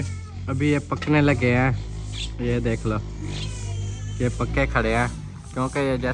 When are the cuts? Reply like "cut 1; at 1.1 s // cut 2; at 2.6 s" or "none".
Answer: none

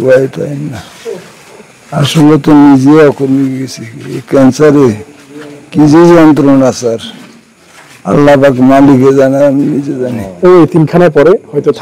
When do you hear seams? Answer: cut 1; at 10.3 s

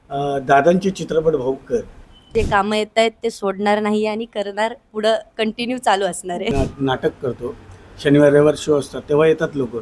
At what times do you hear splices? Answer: cut 1; at 2.3 s // cut 2; at 6.5 s

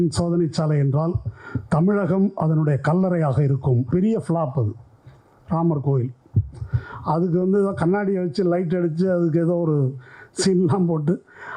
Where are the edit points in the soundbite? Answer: cut 1; at 3.9 s

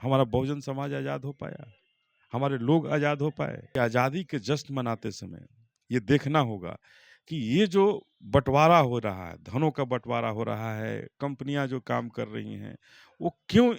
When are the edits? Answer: cut 1; at 3.6 s

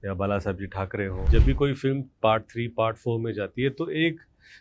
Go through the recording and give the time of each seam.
cut 1; at 1.2 s

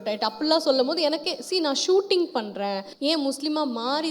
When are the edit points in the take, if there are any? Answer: cut 1; at 2.9 s

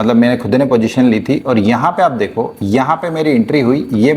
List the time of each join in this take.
none

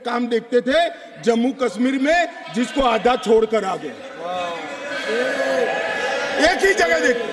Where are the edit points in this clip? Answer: none

